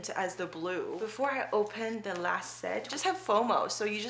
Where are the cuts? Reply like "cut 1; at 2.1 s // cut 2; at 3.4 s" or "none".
cut 1; at 0.9 s // cut 2; at 2.9 s